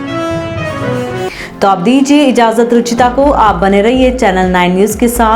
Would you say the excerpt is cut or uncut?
uncut